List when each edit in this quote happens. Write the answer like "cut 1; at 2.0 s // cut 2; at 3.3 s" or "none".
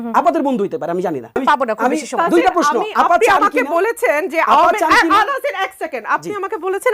cut 1; at 1.3 s